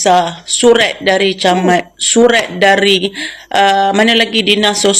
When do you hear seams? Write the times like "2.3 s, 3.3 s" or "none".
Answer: none